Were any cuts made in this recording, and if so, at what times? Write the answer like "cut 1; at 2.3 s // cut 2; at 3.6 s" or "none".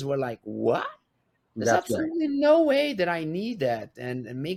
none